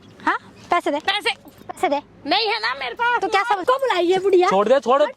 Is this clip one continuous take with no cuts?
no; 1 cut; at 3.6 s

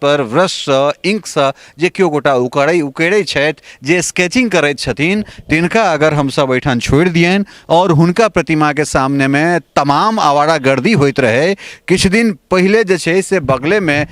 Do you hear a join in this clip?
no; 0 cuts

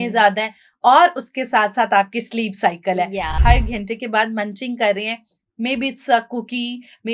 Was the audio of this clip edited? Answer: yes; 1 cut; at 3.3 s

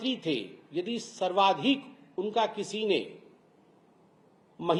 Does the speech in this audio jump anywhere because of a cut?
no; 0 cuts

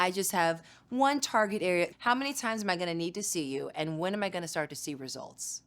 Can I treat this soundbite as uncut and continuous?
no; 1 cut; at 1.9 s

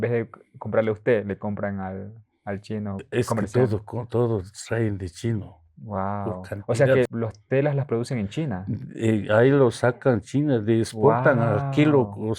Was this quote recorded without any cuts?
no; 2 cuts; at 3.1 s, 7.1 s

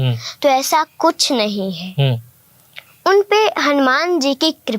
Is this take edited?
no; 0 cuts

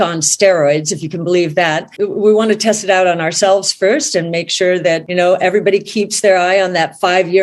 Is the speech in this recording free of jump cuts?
no; 2 cuts; at 1.9 s, 5.0 s

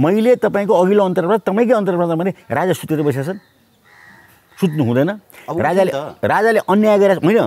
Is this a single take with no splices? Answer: yes; 0 cuts

